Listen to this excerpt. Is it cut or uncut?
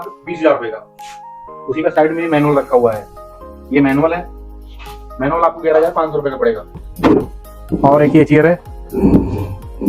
cut